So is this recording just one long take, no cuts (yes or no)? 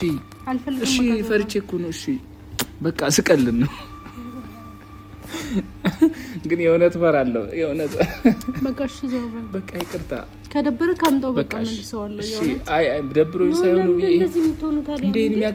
yes